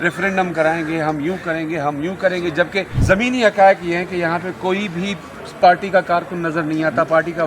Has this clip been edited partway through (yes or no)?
yes